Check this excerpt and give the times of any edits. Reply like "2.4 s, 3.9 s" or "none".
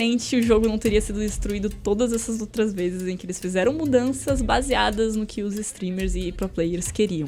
none